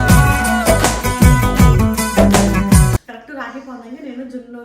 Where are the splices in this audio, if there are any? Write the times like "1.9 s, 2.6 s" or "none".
3.1 s

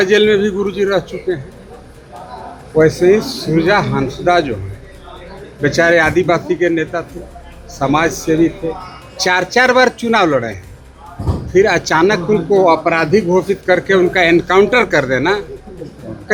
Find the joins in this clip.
none

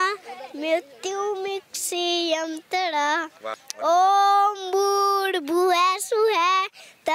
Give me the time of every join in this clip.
3.5 s

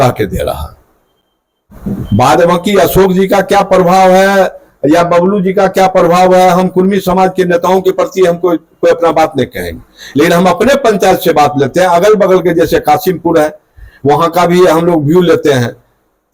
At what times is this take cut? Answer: none

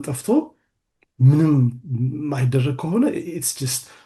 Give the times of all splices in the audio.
none

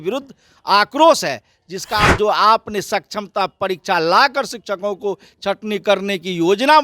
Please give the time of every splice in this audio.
2.1 s

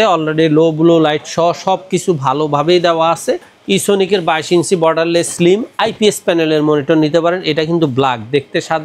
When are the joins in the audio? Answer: 3.5 s

